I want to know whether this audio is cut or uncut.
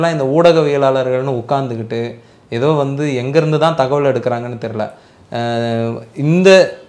uncut